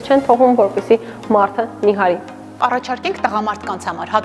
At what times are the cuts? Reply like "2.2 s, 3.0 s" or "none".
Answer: 2.6 s